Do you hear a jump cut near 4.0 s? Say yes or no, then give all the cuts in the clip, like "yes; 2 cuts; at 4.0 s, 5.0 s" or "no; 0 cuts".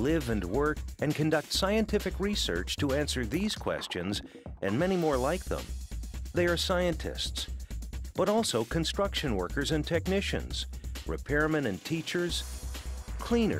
yes; 1 cut; at 4.0 s